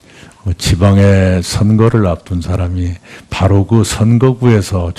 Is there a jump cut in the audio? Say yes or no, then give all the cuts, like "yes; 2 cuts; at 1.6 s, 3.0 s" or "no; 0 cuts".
yes; 1 cut; at 1.8 s